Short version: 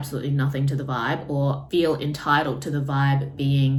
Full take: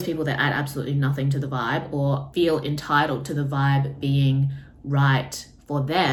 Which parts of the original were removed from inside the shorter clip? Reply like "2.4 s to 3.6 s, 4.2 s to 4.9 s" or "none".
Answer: none